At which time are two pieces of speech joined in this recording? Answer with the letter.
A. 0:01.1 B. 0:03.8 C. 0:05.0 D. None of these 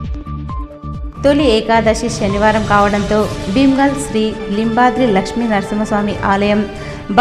A